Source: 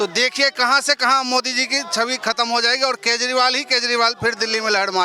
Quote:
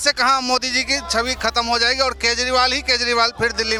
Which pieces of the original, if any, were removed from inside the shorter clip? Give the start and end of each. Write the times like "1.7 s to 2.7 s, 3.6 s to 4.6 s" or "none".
none